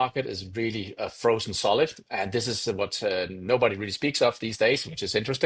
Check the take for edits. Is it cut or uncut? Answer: uncut